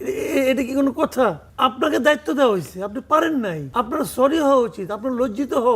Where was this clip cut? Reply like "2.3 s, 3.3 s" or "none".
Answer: 1.5 s, 3.6 s